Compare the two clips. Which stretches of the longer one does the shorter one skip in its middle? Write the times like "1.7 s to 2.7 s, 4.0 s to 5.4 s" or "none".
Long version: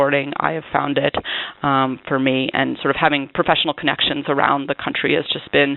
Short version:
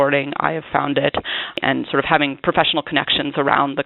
1.6 s to 2.5 s